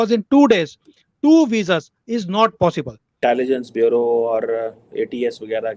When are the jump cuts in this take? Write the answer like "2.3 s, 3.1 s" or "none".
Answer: 3.2 s